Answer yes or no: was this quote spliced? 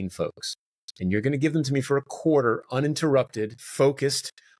yes